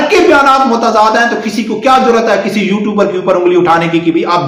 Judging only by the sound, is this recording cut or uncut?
uncut